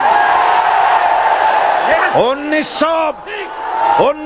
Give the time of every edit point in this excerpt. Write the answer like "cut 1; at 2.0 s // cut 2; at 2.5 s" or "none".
none